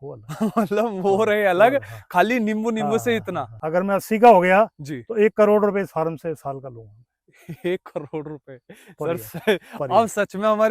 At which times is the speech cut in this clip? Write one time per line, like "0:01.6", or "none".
0:03.5

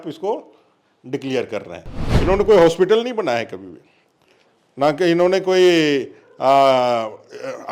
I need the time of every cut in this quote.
0:02.1

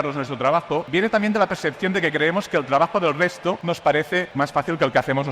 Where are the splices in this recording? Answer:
0:00.9
0:03.6
0:04.3

